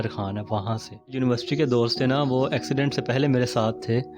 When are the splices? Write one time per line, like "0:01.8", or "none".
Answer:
0:01.1